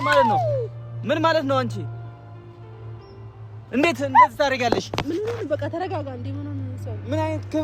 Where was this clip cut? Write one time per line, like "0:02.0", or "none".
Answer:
none